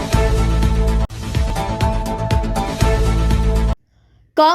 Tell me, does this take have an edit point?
yes; 1 cut; at 1.2 s

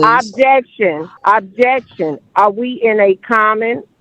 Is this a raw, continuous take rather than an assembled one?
no; 1 cut; at 1.1 s

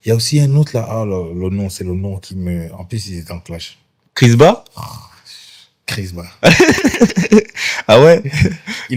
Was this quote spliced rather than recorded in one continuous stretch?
no; 0 cuts

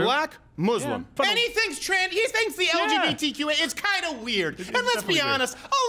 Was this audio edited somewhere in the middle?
yes; 1 cut; at 1.1 s

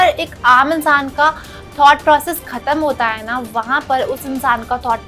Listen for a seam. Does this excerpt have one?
no; 0 cuts

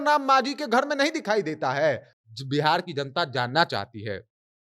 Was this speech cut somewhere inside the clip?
yes; 1 cut; at 2.1 s

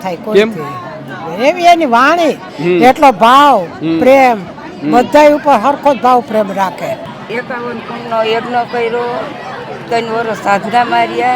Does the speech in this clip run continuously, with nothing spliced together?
no; 1 cut; at 7.1 s

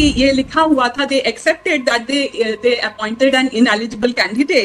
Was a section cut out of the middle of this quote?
no; 0 cuts

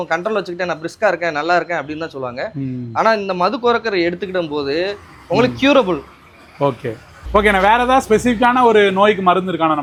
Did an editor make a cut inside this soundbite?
no; 0 cuts

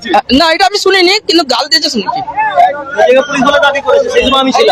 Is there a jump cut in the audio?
no; 0 cuts

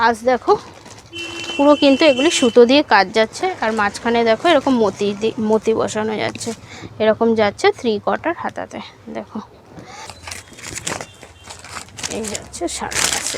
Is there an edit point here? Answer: yes; 1 cut; at 10.0 s

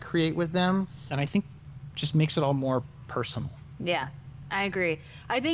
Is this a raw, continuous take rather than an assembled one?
no; 1 cut; at 1.1 s

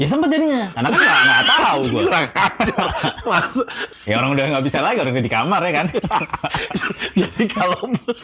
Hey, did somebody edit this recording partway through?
yes; 1 cut; at 3.8 s

